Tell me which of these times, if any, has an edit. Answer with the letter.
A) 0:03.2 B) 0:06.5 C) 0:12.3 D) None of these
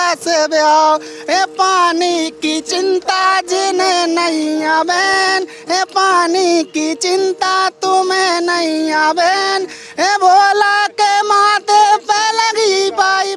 D